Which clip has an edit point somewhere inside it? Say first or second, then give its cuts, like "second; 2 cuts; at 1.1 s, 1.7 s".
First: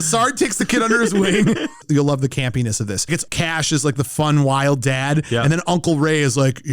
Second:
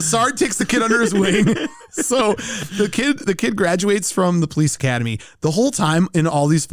first; 1 cut; at 1.8 s